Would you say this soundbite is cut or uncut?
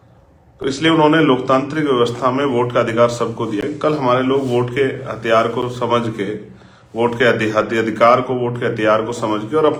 uncut